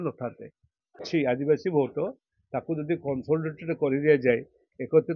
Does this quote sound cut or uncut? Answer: cut